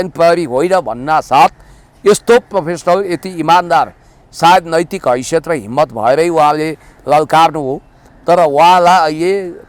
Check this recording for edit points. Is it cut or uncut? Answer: uncut